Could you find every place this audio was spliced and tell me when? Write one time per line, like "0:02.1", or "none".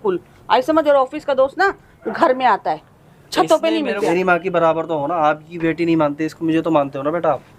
0:03.9